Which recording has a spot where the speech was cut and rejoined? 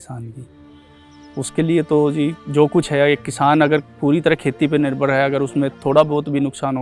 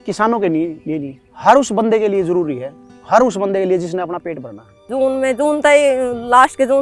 second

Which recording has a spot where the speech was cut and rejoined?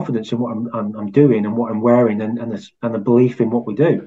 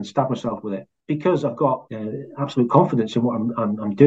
second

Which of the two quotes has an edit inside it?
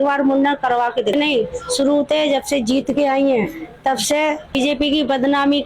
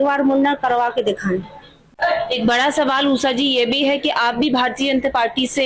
first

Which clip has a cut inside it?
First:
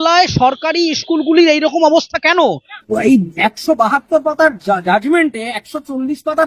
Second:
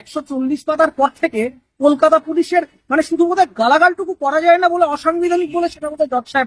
first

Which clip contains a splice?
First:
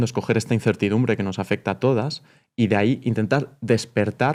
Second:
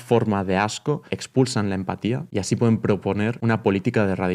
second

